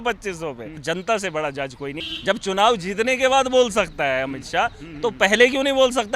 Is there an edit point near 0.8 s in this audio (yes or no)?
yes